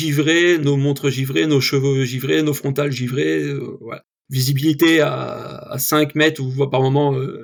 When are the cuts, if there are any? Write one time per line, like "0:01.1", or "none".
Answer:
none